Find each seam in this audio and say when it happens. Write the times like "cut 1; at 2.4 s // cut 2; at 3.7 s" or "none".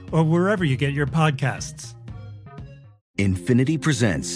cut 1; at 2.9 s